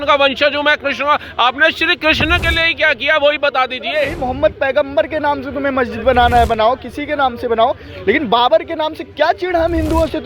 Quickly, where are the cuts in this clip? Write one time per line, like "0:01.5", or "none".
0:04.1